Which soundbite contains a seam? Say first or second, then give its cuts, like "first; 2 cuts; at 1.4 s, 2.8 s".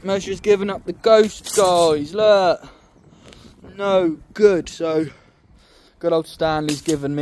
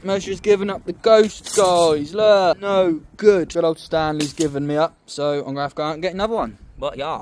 second; 2 cuts; at 2.6 s, 3.5 s